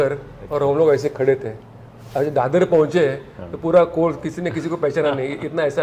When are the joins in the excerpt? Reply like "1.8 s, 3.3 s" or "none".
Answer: none